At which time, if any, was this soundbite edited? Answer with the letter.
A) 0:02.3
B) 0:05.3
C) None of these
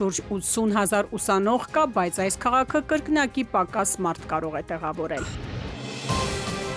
C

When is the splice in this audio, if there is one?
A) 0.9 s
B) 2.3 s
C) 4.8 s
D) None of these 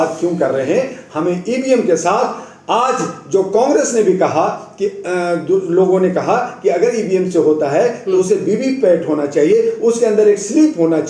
D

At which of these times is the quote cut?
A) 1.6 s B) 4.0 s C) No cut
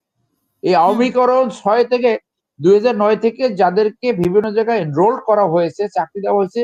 C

